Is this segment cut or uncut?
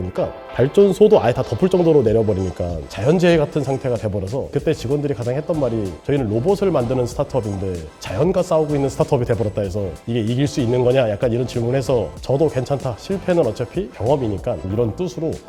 uncut